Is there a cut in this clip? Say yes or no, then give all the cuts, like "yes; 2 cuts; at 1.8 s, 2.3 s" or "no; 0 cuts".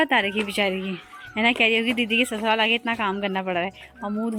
no; 0 cuts